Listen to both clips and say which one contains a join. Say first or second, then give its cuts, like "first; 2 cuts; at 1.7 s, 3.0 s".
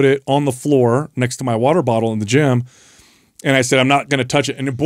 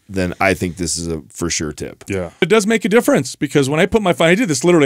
second; 1 cut; at 2.4 s